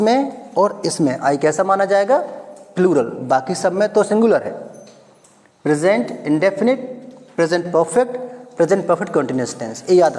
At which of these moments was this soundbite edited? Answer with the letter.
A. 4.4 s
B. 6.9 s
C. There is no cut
C